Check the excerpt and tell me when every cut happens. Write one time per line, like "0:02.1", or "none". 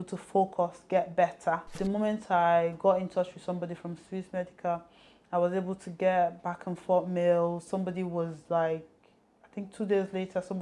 0:01.8